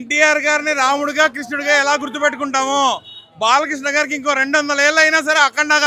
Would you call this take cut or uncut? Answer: uncut